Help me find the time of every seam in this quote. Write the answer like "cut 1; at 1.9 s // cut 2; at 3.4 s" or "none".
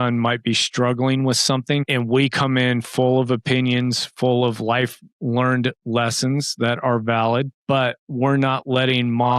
cut 1; at 1.9 s